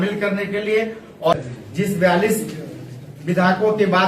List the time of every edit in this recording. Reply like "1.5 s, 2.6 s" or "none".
1.3 s